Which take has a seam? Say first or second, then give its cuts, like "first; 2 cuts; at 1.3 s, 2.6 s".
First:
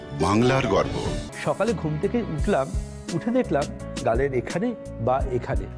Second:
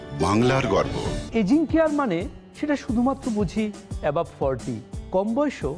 second; 1 cut; at 1.2 s